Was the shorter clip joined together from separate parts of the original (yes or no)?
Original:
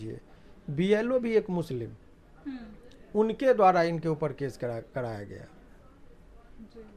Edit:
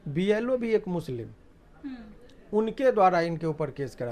no